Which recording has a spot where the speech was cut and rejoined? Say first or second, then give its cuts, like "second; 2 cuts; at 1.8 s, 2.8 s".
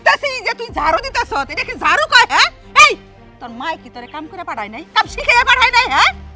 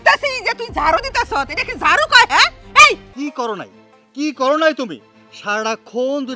second; 1 cut; at 3.1 s